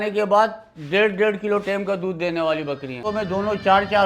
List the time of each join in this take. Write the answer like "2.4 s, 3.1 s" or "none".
3.0 s